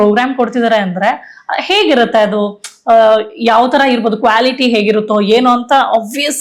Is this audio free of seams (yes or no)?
yes